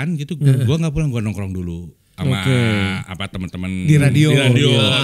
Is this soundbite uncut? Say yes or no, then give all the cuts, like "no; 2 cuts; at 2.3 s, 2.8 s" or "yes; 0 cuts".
yes; 0 cuts